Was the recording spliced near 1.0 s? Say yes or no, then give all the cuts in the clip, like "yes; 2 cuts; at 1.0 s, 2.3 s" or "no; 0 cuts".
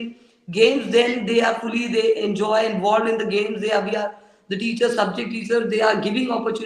no; 0 cuts